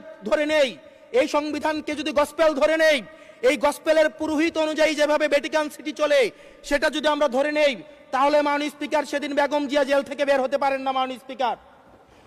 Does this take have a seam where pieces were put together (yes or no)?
no